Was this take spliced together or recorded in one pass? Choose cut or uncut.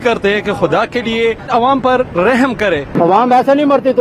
cut